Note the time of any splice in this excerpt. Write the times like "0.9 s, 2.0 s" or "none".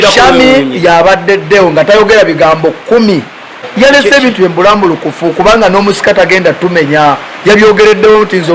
3.6 s